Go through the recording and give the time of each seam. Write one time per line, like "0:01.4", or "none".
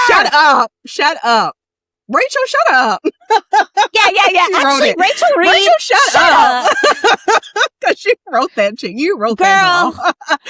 0:02.8